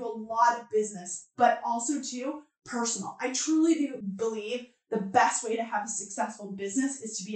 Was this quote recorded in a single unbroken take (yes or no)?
no